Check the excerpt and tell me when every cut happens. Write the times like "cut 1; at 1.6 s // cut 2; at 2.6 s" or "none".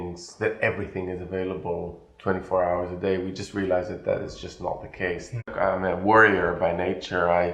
cut 1; at 5.5 s

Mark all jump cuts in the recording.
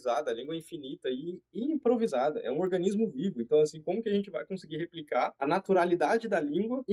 none

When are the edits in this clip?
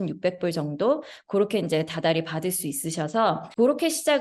none

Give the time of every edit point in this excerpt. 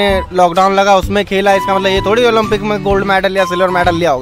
none

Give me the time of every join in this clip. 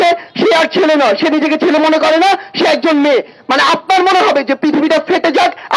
none

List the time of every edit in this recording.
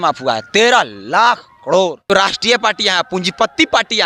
cut 1; at 2.1 s

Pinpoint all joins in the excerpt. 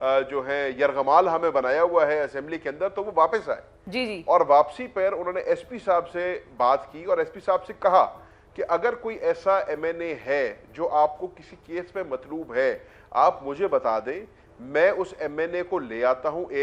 none

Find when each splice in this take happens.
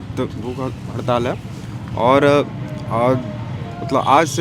none

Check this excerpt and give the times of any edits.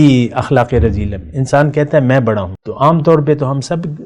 cut 1; at 2.6 s

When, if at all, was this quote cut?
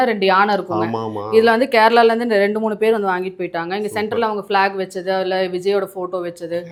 none

